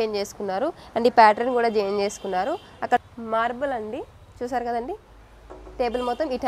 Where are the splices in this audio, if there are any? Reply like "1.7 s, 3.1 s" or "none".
3.0 s

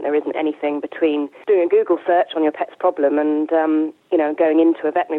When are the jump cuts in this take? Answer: 1.3 s

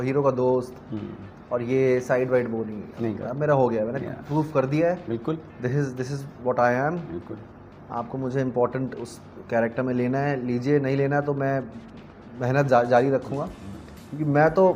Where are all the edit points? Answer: none

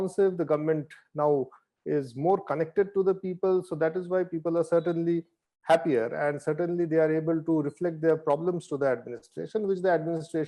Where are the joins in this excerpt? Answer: none

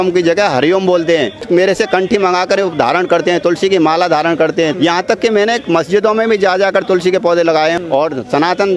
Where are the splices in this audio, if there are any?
1.4 s, 4.7 s, 7.8 s

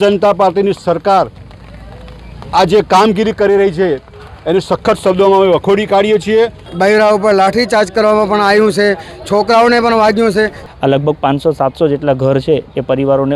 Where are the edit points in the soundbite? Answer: 6.6 s, 10.6 s

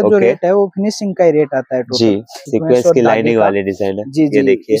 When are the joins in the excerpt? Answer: 2.4 s

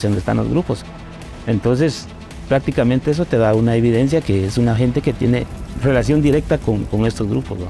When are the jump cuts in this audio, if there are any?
5.6 s

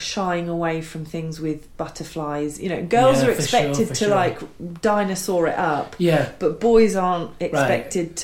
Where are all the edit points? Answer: none

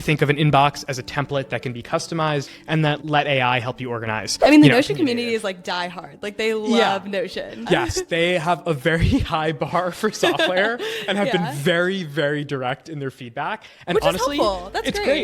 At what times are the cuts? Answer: 2.8 s, 4.2 s, 7.6 s

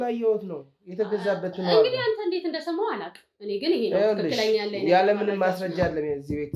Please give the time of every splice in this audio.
none

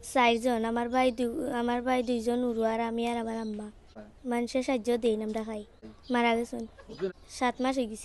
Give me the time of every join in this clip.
4.0 s, 5.9 s, 7.1 s

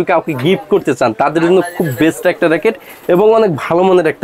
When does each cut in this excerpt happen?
none

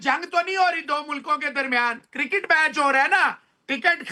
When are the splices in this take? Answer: none

